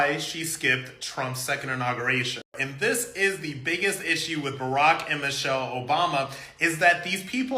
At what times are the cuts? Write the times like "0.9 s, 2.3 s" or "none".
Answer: 2.6 s